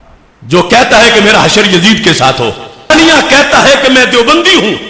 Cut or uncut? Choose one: cut